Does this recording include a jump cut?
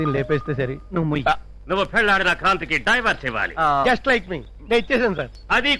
no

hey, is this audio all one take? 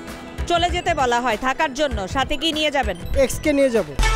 yes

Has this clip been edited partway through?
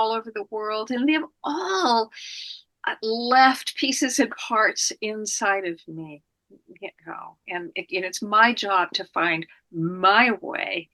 no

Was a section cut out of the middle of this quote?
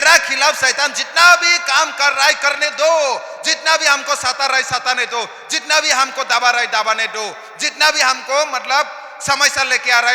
no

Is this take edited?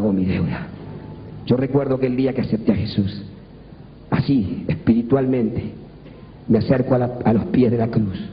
no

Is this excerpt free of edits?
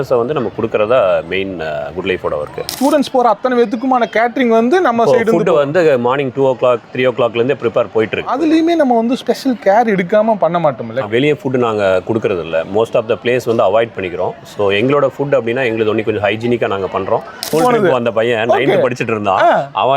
no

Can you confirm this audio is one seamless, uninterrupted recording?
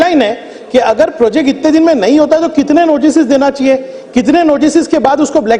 yes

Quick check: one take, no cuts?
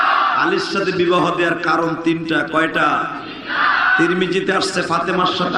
yes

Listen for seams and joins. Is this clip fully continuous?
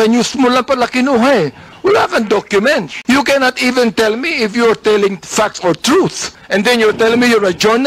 yes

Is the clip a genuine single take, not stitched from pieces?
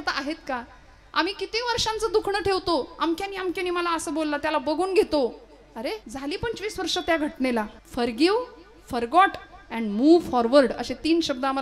no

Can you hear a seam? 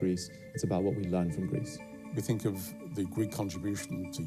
no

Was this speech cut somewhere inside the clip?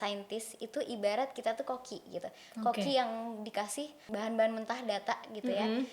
yes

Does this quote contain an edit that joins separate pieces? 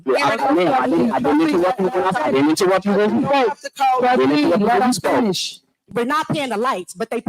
yes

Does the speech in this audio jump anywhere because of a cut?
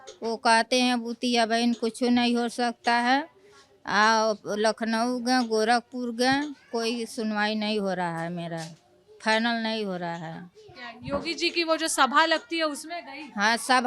no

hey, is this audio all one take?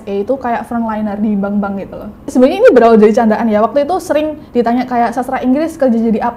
no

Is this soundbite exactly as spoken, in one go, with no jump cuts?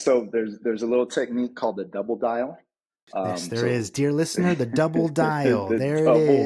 yes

